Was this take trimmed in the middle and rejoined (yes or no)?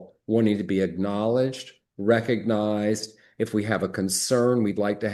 no